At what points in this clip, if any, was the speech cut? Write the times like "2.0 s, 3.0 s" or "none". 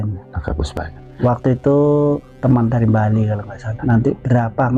1.0 s, 2.3 s, 3.7 s